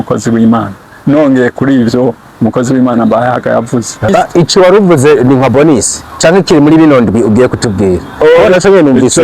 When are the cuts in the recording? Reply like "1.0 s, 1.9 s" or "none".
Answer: 4.1 s